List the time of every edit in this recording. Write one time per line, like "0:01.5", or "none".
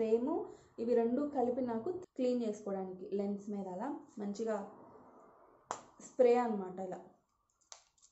0:02.0